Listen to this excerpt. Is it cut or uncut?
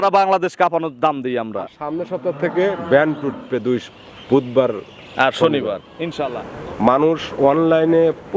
cut